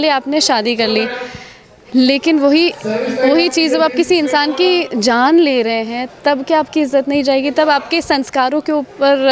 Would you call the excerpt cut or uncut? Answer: uncut